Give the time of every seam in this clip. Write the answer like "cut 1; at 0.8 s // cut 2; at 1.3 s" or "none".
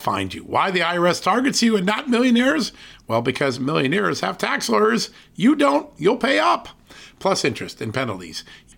none